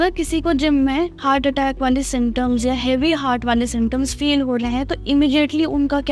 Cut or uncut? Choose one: uncut